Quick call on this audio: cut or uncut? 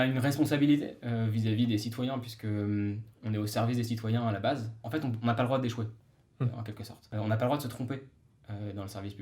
cut